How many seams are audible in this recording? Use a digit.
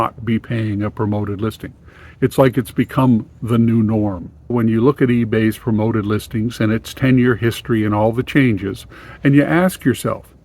1